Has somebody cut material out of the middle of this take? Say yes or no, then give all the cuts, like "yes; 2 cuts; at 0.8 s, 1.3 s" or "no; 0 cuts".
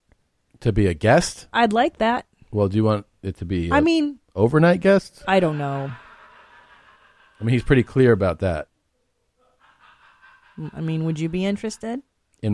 yes; 1 cut; at 8.8 s